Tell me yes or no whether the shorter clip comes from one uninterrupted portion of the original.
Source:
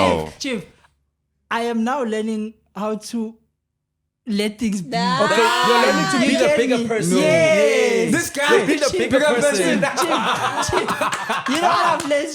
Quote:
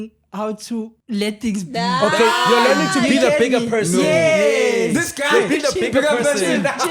no